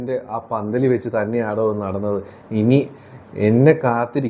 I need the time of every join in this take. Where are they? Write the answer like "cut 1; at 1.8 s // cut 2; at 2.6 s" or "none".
none